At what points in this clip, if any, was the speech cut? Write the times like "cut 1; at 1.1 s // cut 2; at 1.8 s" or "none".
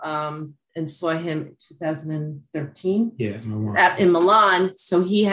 none